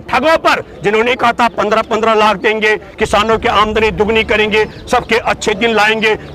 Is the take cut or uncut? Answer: uncut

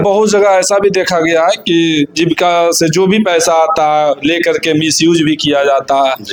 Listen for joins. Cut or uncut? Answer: uncut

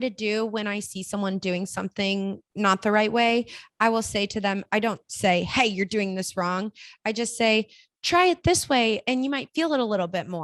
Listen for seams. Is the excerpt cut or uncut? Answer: cut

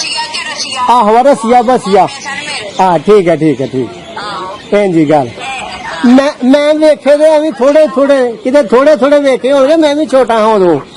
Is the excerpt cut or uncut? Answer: uncut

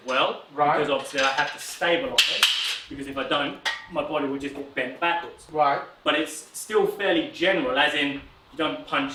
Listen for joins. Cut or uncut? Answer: uncut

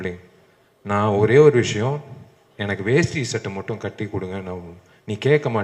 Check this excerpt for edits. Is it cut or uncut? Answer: uncut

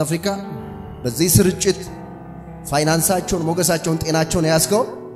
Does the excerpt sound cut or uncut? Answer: uncut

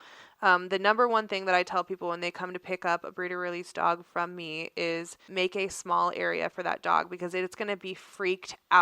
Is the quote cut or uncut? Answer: cut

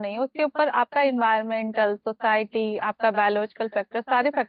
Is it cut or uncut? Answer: uncut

